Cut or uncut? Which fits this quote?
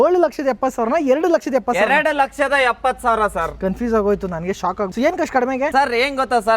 cut